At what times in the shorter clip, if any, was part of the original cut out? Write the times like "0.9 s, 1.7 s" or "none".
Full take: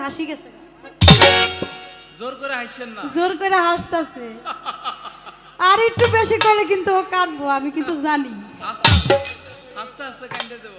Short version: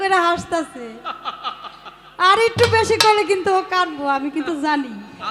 none